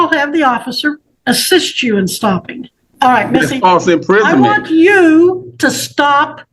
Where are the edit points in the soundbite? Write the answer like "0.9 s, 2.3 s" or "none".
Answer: 1.1 s, 2.8 s